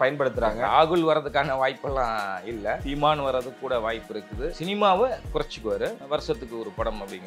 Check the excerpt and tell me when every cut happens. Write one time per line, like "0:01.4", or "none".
0:02.8
0:04.6
0:06.0